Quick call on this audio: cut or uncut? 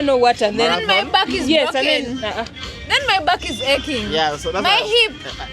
uncut